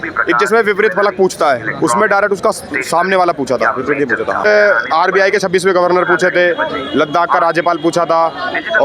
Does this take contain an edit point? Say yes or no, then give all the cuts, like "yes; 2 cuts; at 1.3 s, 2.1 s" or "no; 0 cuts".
yes; 1 cut; at 4.4 s